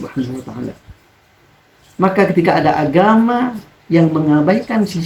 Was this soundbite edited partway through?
no; 0 cuts

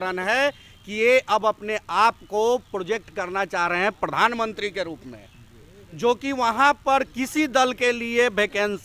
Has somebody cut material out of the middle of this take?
no; 0 cuts

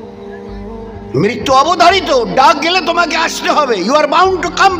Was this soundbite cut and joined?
yes; 1 cut; at 1.1 s

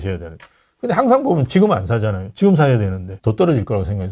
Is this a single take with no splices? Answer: yes; 0 cuts

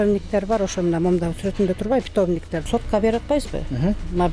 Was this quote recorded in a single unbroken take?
no; 1 cut; at 2.6 s

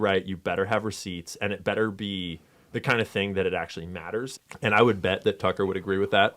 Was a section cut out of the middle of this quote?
yes; 1 cut; at 4.4 s

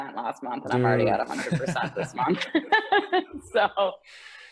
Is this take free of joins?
yes; 0 cuts

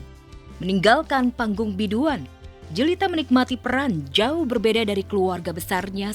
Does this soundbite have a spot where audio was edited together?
no; 0 cuts

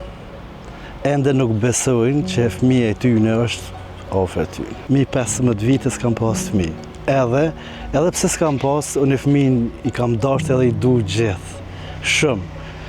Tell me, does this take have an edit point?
yes; 1 cut; at 4.8 s

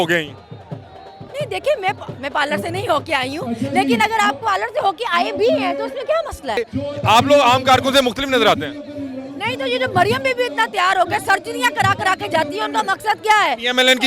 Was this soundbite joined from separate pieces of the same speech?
yes; 1 cut; at 6.6 s

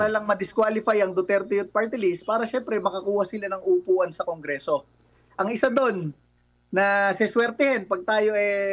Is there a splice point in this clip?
no; 0 cuts

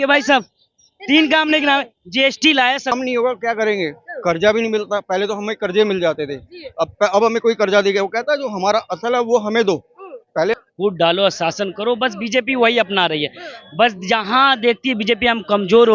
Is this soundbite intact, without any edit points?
no; 2 cuts; at 2.9 s, 10.6 s

